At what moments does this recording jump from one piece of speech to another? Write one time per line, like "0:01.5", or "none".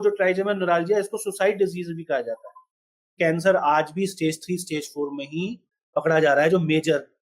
0:03.2